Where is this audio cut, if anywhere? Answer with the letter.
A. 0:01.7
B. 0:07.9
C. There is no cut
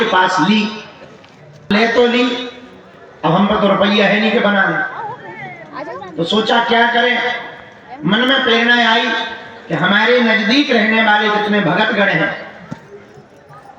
A